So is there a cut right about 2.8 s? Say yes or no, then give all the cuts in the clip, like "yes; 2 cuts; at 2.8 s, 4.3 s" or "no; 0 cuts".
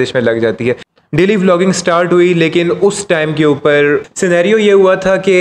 no; 2 cuts; at 0.9 s, 4.1 s